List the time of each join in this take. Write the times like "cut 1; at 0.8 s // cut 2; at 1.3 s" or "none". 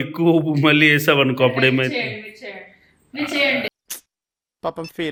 none